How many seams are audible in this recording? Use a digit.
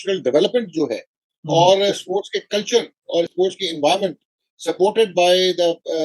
0